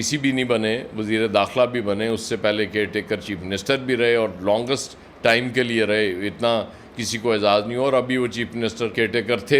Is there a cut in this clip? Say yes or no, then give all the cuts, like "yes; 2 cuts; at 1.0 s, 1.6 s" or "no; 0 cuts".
no; 0 cuts